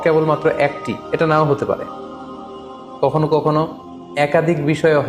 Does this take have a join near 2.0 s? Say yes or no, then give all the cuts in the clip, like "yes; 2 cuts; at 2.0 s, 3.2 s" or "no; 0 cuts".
no; 0 cuts